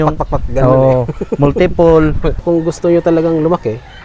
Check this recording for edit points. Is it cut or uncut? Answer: cut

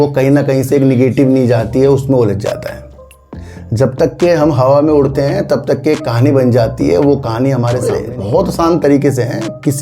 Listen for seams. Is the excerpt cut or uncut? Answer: cut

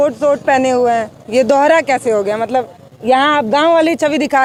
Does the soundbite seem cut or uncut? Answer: uncut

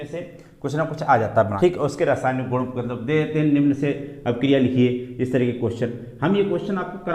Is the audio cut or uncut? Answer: cut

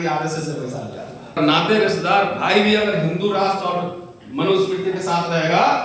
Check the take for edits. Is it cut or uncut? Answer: cut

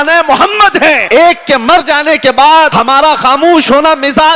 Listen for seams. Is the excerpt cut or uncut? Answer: cut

